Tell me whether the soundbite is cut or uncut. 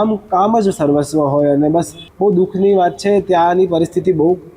cut